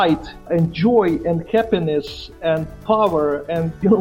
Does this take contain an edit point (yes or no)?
no